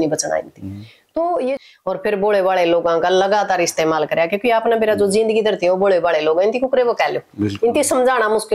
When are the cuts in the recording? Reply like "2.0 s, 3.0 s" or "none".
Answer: 1.6 s